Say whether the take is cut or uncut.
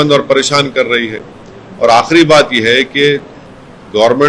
uncut